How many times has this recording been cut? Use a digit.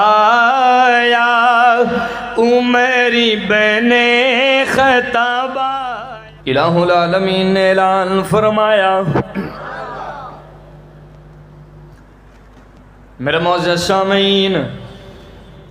1